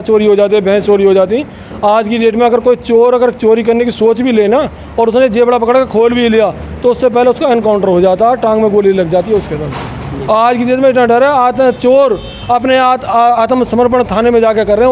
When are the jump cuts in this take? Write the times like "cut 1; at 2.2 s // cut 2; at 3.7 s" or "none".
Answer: none